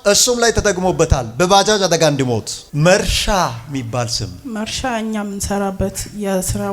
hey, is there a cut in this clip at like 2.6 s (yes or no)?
yes